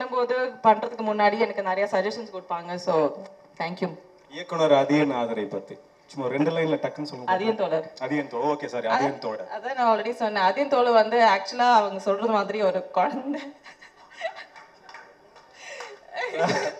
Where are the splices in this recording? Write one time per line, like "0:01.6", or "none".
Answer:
none